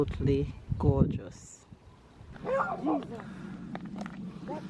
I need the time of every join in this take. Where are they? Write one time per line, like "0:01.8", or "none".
0:02.4